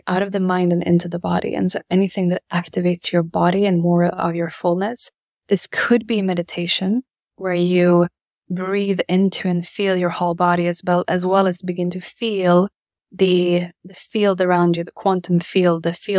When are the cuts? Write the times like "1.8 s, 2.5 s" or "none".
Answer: none